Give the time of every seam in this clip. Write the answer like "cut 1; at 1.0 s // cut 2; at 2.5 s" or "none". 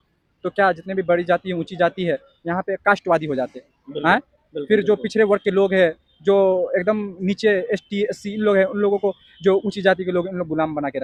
none